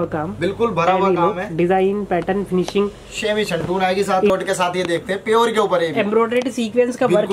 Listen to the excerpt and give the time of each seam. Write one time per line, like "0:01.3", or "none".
0:04.3